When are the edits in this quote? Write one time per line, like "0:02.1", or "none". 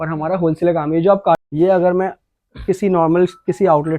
0:01.4